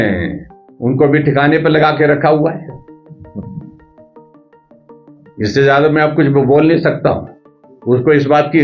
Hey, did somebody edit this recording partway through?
yes; 2 cuts; at 3.8 s, 5.2 s

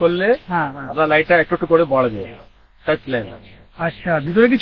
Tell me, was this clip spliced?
no; 0 cuts

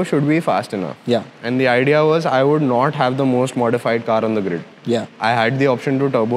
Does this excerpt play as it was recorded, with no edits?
yes; 0 cuts

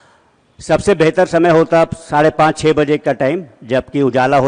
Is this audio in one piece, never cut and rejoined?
yes; 0 cuts

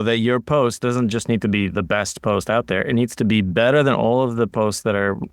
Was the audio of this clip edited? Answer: no; 0 cuts

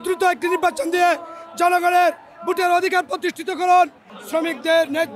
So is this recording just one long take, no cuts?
no; 1 cut; at 4.1 s

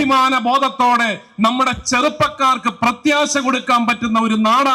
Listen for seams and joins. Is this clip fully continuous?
yes; 0 cuts

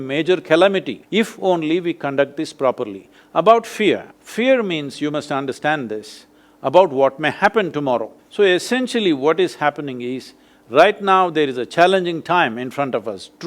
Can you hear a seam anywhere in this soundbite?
yes; 3 cuts; at 1.0 s, 4.2 s, 8.2 s

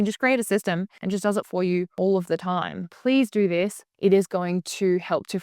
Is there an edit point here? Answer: yes; 4 cuts; at 0.9 s, 1.9 s, 2.8 s, 3.8 s

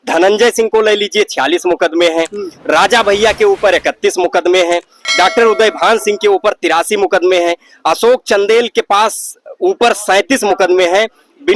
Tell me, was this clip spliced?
no; 0 cuts

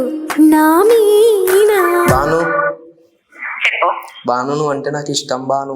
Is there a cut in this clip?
yes; 1 cut; at 2.1 s

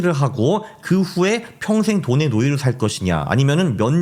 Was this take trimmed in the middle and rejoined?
no; 0 cuts

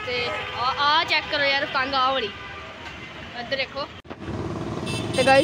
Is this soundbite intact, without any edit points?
no; 1 cut; at 4.0 s

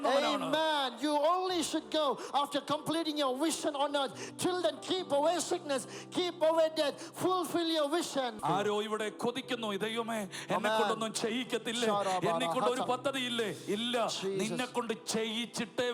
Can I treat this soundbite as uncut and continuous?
no; 1 cut; at 8.4 s

